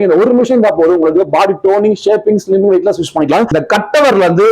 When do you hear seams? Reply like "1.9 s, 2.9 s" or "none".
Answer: 3.5 s